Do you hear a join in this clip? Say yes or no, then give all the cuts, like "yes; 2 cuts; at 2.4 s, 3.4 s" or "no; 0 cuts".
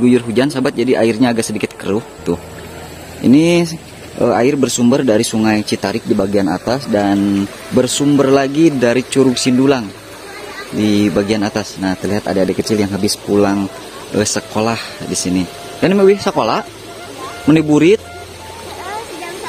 no; 0 cuts